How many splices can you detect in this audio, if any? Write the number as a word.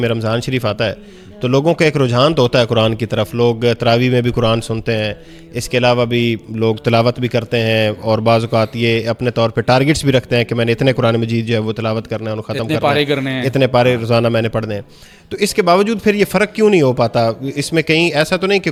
zero